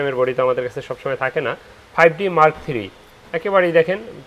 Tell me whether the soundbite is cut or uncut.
uncut